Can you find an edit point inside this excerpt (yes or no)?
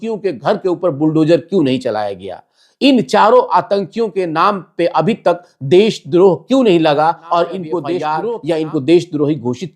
yes